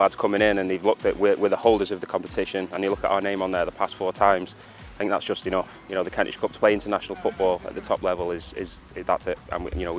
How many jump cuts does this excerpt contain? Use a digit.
0